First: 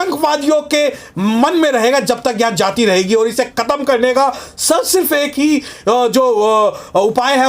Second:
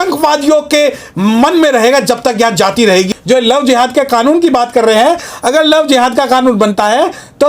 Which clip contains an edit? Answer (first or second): second